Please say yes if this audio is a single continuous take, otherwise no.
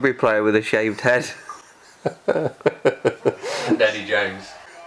yes